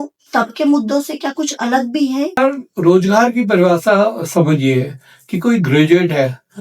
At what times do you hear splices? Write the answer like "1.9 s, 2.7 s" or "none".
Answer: 2.4 s